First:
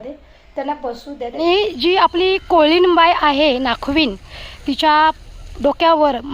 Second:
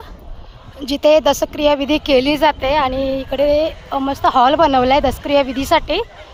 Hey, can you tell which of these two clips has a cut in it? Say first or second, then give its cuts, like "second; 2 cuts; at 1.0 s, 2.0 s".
first; 1 cut; at 1.4 s